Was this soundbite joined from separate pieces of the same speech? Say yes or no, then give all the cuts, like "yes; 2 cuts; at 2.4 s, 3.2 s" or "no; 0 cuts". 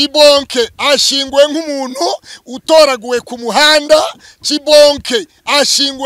no; 0 cuts